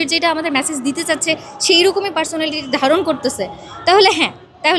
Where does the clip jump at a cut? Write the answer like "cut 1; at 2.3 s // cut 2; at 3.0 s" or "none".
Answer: none